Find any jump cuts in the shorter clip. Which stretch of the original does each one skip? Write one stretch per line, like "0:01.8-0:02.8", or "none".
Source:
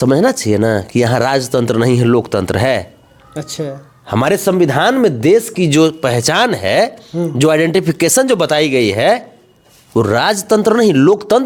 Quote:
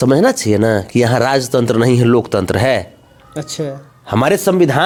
none